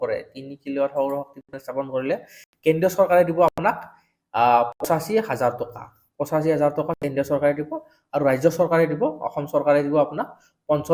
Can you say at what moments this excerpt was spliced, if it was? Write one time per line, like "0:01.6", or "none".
none